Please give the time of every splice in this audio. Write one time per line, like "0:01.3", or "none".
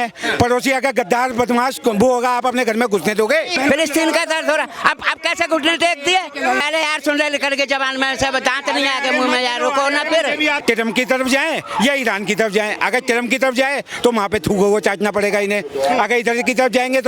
0:03.5
0:06.6
0:10.6